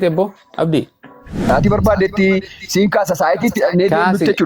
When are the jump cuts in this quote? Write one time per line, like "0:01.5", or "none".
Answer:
0:01.5